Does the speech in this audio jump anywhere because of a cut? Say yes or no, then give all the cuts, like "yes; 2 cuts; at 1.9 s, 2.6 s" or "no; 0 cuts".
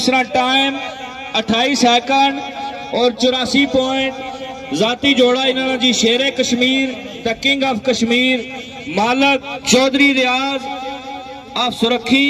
yes; 1 cut; at 9.5 s